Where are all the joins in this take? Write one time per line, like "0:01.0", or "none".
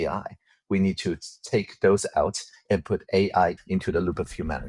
0:03.6